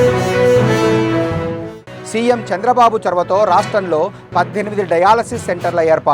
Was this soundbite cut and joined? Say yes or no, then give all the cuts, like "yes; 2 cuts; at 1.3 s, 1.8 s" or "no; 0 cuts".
yes; 1 cut; at 1.6 s